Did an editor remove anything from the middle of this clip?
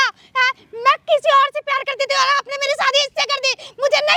no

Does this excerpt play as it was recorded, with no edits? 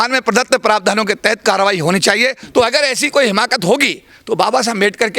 no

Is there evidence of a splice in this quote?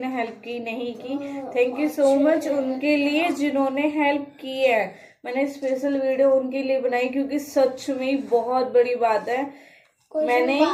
no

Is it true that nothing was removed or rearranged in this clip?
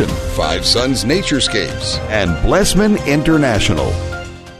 yes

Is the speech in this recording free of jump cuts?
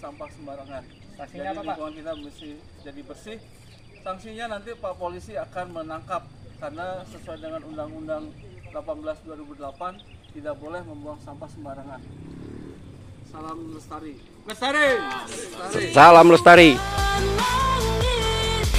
yes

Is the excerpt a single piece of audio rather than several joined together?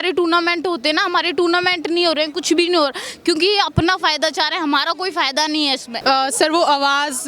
no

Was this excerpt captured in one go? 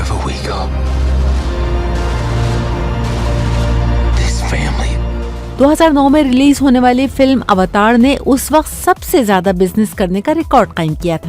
no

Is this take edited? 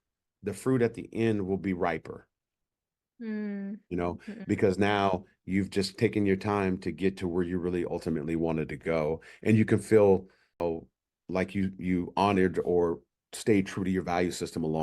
yes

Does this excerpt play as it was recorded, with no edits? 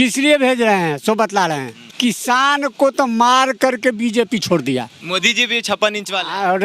no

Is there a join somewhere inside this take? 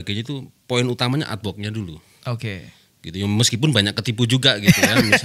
no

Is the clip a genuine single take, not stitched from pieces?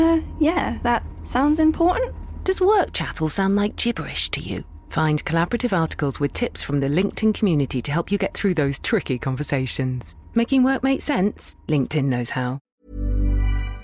no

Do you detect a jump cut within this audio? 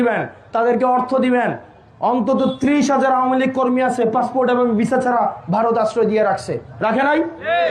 no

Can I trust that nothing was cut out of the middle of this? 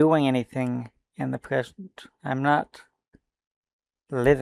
yes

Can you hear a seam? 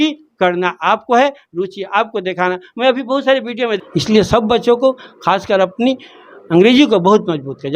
yes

